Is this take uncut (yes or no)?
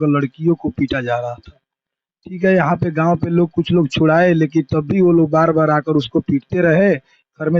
yes